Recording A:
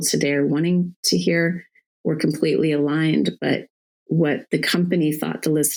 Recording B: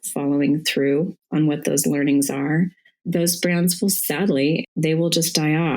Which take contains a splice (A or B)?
B